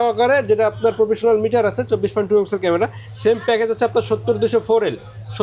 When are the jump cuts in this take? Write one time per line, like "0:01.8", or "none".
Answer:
none